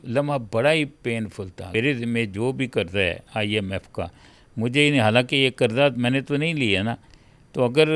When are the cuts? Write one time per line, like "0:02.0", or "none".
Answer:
0:01.7

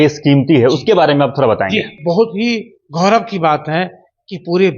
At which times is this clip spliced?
0:01.9

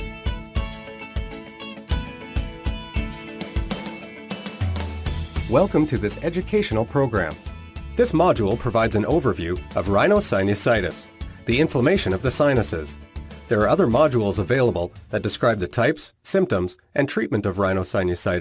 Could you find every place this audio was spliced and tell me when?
0:14.6

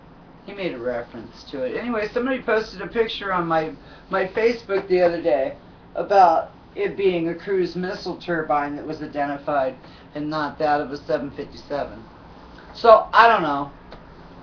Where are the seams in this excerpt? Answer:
0:10.3

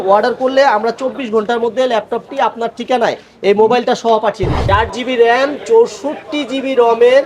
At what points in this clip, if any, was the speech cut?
0:04.5

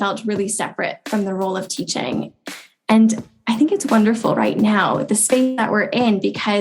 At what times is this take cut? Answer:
0:02.3

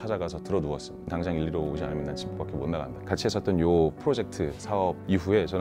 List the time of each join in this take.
0:03.0

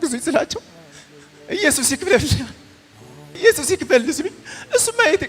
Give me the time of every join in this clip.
0:03.3

